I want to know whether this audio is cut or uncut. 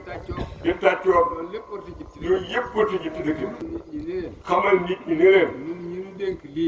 cut